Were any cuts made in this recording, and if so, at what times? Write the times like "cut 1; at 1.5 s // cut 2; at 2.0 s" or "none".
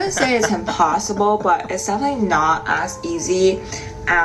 none